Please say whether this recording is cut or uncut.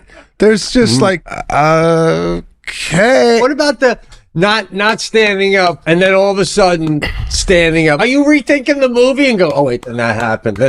cut